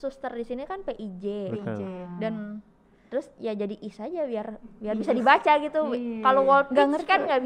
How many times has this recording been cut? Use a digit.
0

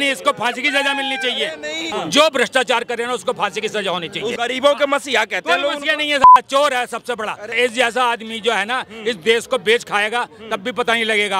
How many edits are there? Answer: 3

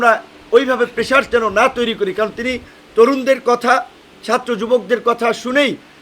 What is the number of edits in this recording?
0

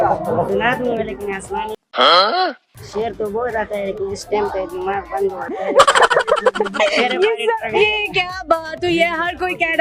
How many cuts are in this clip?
1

